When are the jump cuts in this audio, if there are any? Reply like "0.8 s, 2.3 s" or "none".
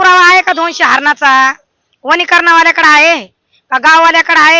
none